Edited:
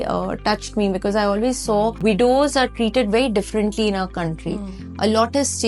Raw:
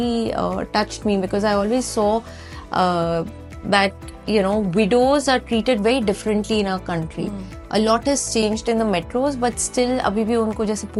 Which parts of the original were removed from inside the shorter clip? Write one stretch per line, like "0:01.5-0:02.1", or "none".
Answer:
0:02.3-0:04.7